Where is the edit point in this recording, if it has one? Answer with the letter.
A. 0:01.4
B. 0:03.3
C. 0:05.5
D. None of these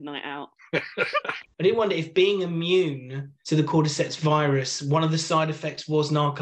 A